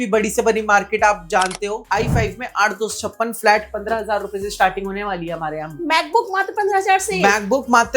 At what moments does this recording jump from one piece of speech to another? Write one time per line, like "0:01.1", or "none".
0:01.8